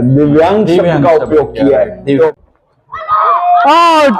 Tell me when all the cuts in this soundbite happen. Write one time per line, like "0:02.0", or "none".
none